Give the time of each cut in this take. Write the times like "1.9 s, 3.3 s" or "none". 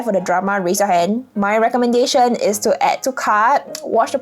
1.3 s